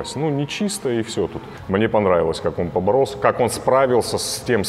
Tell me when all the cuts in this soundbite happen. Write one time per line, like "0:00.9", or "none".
0:01.4